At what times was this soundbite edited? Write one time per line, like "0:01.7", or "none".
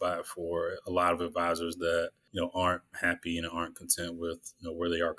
0:02.2